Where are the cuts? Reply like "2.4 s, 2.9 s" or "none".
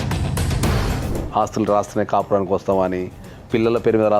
1.0 s

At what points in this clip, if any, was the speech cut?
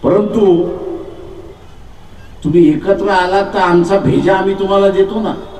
1.6 s

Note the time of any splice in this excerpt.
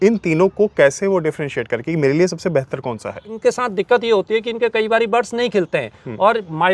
3.3 s

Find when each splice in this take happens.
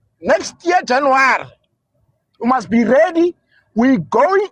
none

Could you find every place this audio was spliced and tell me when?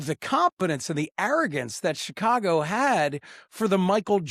none

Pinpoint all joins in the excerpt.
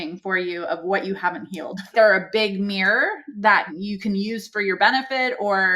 1.9 s, 3.7 s

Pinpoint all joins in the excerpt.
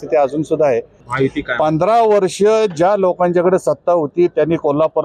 1.0 s

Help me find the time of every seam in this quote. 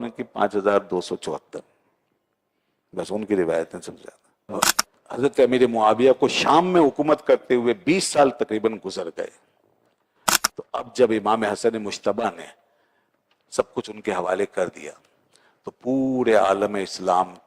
4.5 s

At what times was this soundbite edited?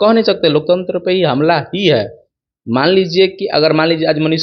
none

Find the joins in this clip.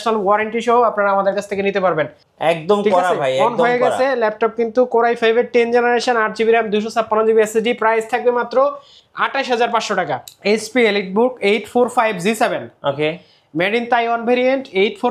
2.2 s, 10.2 s

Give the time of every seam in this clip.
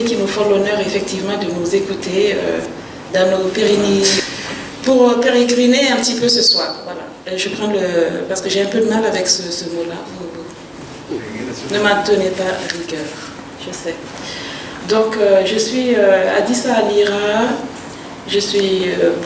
4.2 s

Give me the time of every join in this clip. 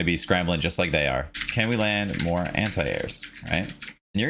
1.4 s

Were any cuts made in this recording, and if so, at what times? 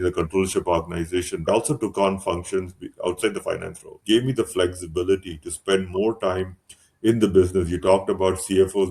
1.5 s, 2.9 s, 4.0 s

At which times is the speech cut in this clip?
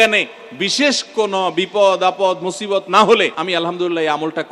3.4 s

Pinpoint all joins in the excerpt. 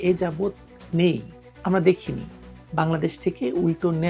none

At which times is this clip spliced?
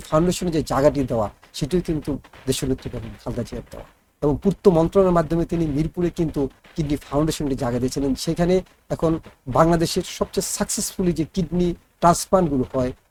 none

